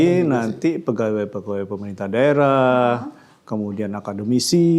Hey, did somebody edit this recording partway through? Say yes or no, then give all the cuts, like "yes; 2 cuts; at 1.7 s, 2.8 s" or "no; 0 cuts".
no; 0 cuts